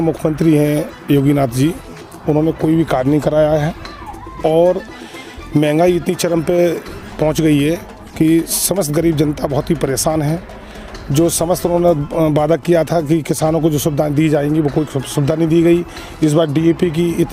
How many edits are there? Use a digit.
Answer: 0